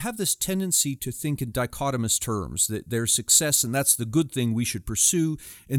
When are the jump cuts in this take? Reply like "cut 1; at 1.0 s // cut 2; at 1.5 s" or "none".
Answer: cut 1; at 1.0 s

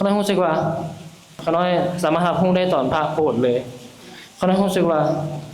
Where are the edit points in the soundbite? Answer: cut 1; at 1.4 s

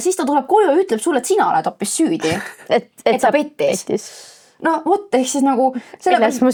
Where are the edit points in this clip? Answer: none

